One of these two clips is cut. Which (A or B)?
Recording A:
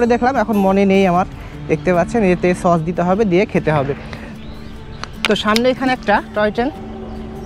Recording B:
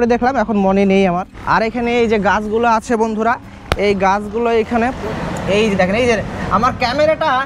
B